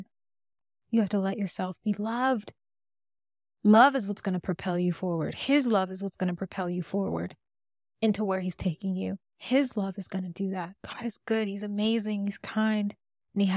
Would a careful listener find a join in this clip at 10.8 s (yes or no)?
yes